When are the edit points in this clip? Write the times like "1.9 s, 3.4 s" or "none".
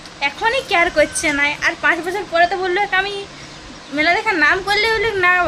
none